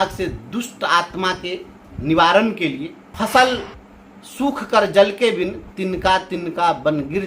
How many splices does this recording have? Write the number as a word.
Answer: one